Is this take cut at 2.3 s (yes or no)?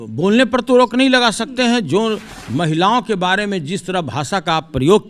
yes